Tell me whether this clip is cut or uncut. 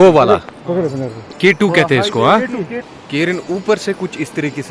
cut